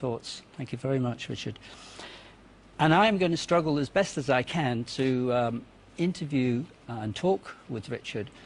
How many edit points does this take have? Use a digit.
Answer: 1